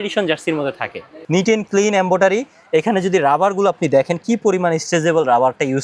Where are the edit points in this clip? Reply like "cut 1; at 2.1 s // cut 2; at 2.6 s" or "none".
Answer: cut 1; at 1.1 s

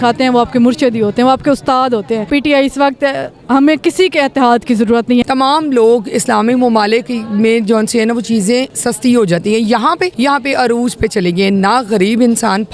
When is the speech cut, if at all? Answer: cut 1; at 2.3 s // cut 2; at 5.2 s // cut 3; at 8.8 s // cut 4; at 10.1 s

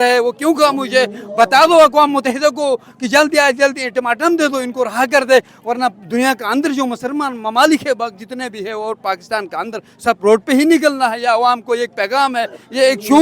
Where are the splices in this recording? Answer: none

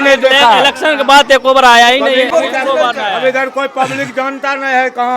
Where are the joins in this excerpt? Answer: cut 1; at 2.3 s

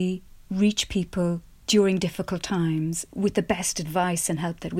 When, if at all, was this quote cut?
cut 1; at 3.0 s

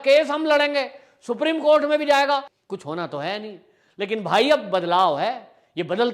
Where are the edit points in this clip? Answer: cut 1; at 2.6 s

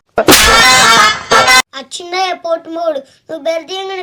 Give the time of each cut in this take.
cut 1; at 1.8 s

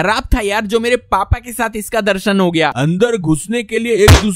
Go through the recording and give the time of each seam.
cut 1; at 2.8 s

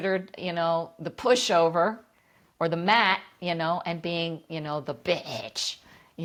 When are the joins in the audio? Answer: none

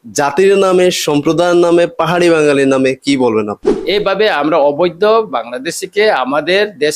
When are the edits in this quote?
cut 1; at 3.8 s

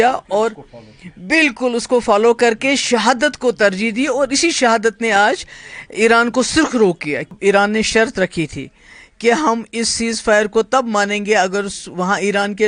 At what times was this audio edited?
cut 1; at 7.3 s

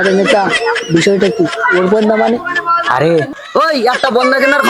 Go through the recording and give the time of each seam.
cut 1; at 3.3 s

